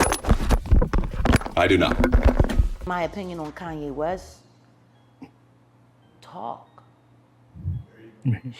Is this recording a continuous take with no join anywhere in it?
no; 1 cut; at 2.7 s

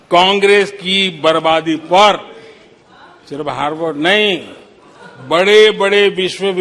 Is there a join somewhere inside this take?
no; 0 cuts

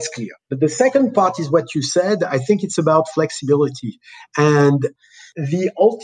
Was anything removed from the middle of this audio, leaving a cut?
yes; 1 cut; at 5.1 s

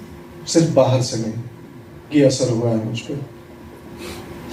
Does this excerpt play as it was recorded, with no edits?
yes; 0 cuts

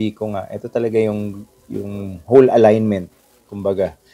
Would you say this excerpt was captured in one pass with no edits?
yes; 0 cuts

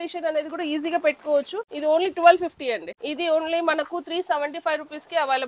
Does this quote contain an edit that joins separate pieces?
yes; 2 cuts; at 1.6 s, 2.9 s

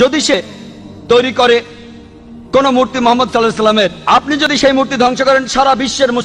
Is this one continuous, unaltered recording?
yes; 0 cuts

